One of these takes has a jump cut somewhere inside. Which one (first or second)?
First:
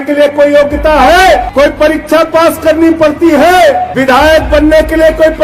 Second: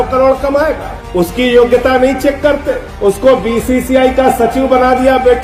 first